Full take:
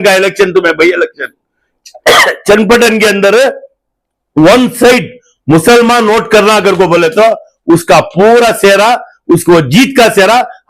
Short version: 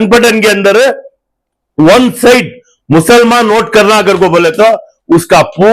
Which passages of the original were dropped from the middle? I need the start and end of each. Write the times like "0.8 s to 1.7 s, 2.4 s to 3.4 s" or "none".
none